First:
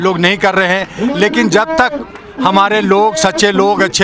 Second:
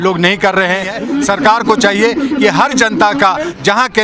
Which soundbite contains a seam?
second; 1 cut; at 1.0 s

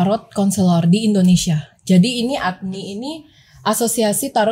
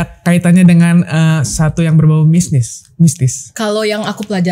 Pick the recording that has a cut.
second; 1 cut; at 3.4 s

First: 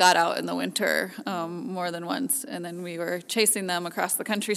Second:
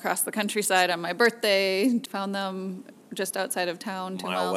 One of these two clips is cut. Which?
second; 1 cut; at 2.1 s

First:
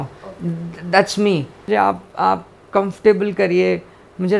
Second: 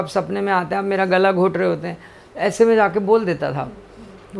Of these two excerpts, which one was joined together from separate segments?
first; 1 cut; at 1.6 s

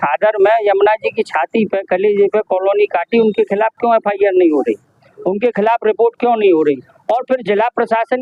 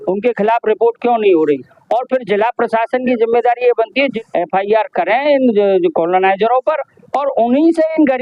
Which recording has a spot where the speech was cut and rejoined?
second; 1 cut; at 4.2 s

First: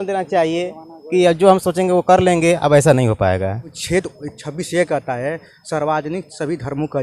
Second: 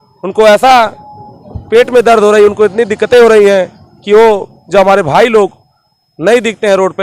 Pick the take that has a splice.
first; 1 cut; at 3.8 s

